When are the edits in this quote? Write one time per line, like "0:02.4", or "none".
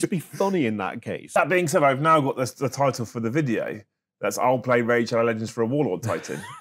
0:01.3